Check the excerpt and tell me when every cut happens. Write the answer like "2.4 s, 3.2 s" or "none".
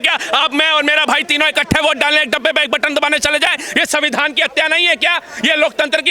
none